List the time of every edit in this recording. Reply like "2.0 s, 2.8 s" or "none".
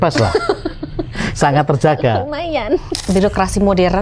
3.0 s